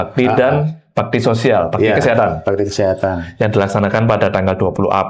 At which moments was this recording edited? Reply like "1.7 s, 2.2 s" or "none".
none